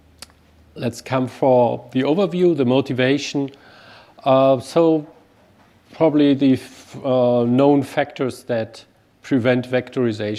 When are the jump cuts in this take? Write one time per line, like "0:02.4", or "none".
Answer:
none